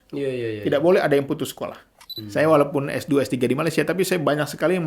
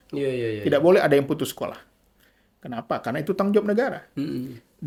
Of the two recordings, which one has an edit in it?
first; 1 cut; at 2.1 s

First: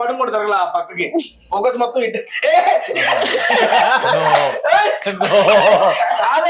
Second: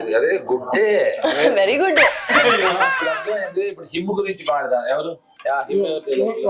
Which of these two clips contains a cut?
second; 2 cuts; at 3.1 s, 5.3 s

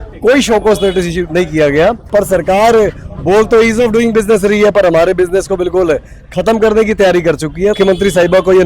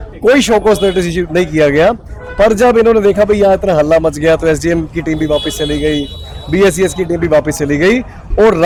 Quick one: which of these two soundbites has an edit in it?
first; 2 cuts; at 2.0 s, 7.8 s

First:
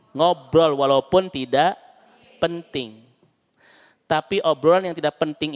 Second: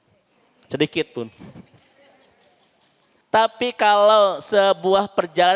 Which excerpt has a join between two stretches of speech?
second; 1 cut; at 3.2 s

